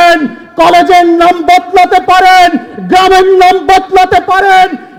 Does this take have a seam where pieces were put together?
no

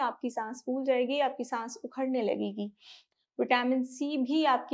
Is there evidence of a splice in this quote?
yes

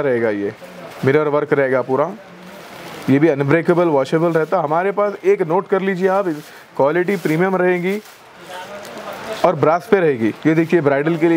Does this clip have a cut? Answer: no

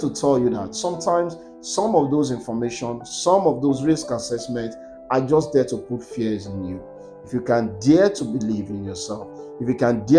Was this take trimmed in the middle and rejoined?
no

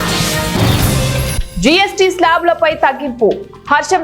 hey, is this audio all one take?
no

